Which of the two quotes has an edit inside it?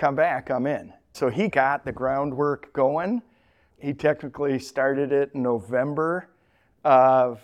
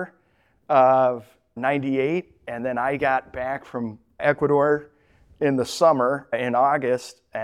first; 1 cut; at 1.1 s

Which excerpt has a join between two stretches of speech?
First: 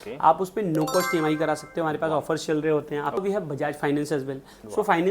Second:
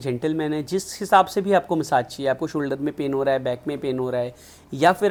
first; 1 cut; at 3.2 s

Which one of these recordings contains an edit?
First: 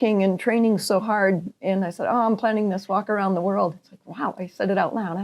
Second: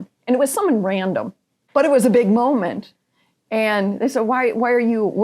second; 1 cut; at 1.6 s

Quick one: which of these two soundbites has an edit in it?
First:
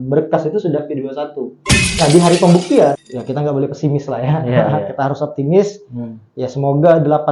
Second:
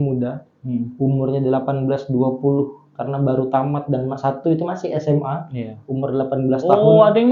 first; 1 cut; at 3.0 s

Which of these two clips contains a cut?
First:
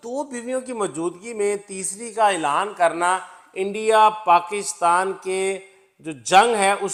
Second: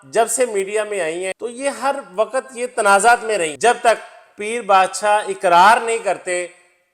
second; 1 cut; at 3.5 s

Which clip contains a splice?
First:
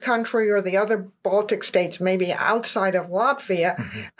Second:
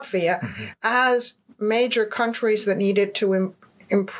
first; 1 cut; at 1.1 s

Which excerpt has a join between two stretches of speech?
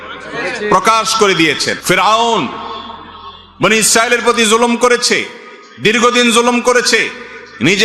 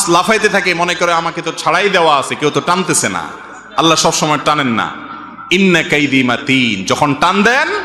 first; 1 cut; at 1.7 s

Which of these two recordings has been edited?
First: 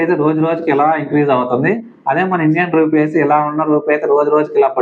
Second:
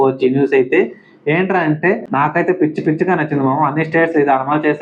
second; 1 cut; at 2.1 s

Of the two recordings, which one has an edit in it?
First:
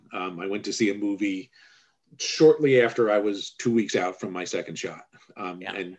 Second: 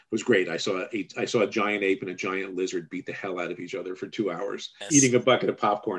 second; 1 cut; at 4.7 s

